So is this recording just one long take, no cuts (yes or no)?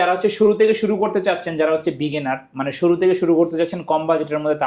yes